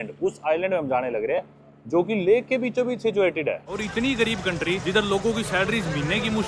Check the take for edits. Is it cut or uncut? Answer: cut